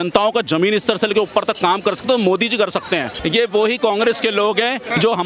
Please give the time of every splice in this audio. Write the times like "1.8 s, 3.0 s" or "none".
3.2 s